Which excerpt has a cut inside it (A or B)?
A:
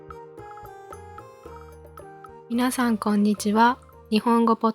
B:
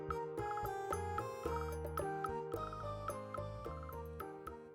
A